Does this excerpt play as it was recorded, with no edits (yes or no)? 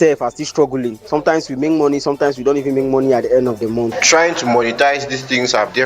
no